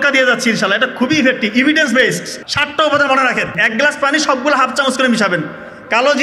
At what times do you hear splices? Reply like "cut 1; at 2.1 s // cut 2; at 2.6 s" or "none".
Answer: cut 1; at 2.3 s // cut 2; at 3.6 s